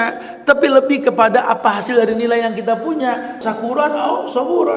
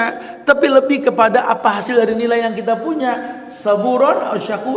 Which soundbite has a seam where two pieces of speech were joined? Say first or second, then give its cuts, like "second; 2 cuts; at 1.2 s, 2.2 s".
first; 1 cut; at 3.4 s